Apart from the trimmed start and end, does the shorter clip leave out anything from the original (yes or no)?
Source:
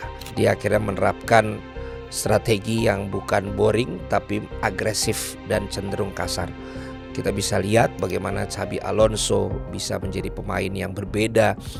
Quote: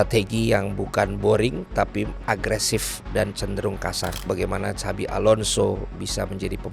yes